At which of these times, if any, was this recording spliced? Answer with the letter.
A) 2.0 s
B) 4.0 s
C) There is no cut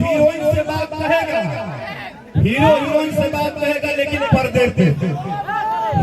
C